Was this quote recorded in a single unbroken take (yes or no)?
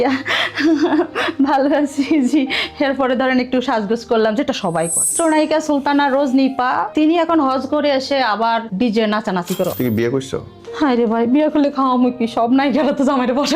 no